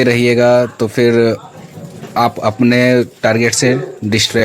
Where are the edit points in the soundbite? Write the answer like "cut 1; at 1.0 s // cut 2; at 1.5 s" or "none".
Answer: none